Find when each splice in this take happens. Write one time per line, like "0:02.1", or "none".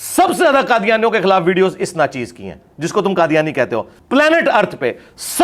0:03.9